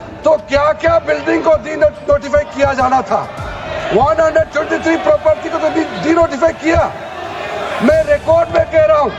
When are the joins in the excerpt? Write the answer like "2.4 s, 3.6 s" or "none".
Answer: none